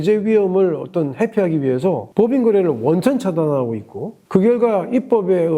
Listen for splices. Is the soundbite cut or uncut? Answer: cut